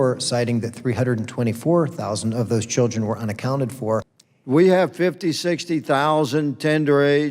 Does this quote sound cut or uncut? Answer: cut